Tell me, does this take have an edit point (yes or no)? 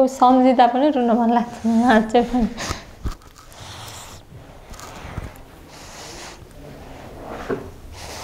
no